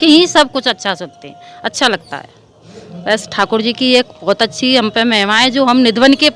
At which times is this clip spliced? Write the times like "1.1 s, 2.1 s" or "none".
none

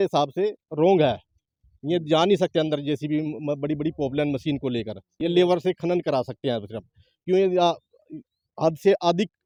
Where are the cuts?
none

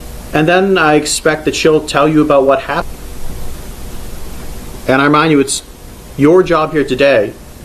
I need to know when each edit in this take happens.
2.8 s

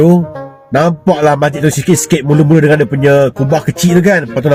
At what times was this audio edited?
none

